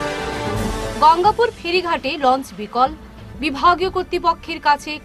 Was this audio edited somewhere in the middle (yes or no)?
yes